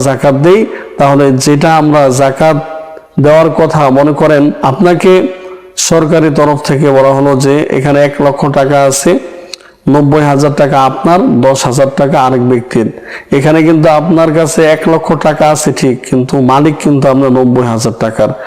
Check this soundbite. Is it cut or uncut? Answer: cut